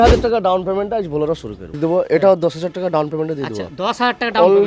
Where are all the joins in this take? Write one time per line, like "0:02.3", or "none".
0:01.8